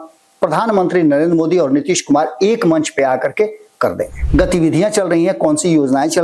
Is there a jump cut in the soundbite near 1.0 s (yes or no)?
no